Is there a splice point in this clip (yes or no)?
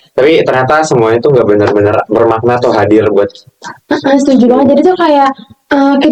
no